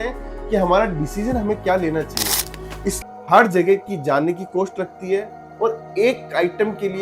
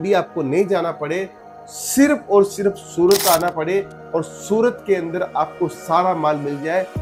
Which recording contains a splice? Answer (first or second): first